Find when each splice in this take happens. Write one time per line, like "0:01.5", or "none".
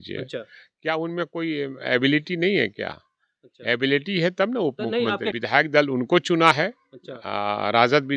0:05.3